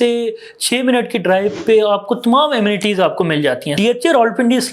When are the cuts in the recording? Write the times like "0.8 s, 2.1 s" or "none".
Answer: 3.7 s